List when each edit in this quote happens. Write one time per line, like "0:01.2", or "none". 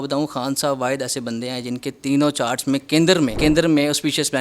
0:03.4